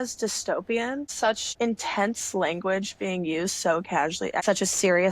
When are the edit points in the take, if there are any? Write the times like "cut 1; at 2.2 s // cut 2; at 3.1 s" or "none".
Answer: cut 1; at 1.3 s // cut 2; at 4.4 s